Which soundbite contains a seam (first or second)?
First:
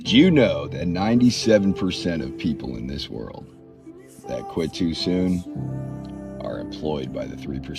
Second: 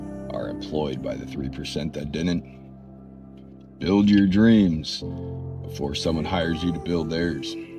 first